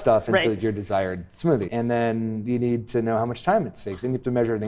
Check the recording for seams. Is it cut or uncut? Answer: cut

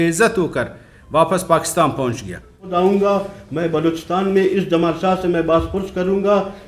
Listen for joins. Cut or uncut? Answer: cut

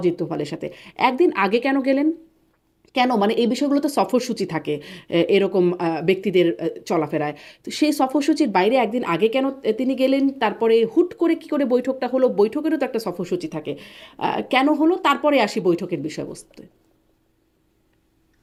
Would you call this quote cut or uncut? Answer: uncut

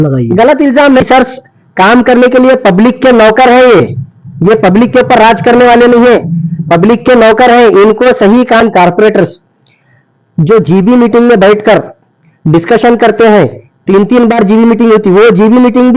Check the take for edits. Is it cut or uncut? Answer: cut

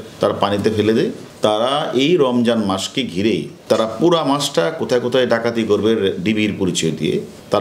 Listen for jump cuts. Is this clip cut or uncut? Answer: uncut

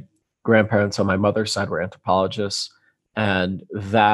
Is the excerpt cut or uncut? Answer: uncut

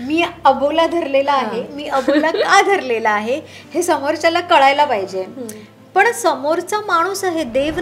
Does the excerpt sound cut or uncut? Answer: uncut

